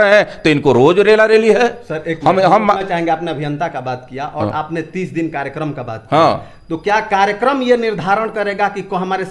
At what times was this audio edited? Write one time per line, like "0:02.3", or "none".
none